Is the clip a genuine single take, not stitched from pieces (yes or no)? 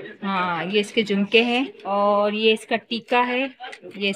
no